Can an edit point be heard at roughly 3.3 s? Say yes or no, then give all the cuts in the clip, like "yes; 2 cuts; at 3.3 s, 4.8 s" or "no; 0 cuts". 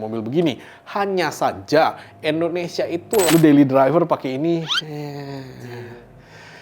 yes; 1 cut; at 3.3 s